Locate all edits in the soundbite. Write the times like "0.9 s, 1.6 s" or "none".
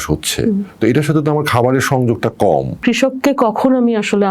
2.8 s